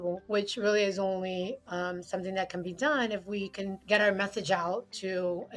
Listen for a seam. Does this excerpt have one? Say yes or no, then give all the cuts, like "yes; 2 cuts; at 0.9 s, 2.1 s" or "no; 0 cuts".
no; 0 cuts